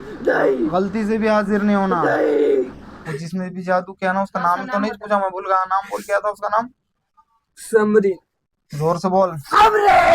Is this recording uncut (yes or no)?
no